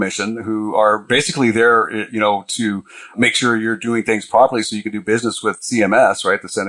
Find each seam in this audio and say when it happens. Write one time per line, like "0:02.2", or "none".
0:03.2
0:05.6